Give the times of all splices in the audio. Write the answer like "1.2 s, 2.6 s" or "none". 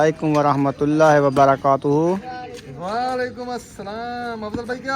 none